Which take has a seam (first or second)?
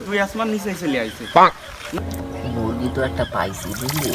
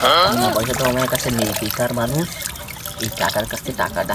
first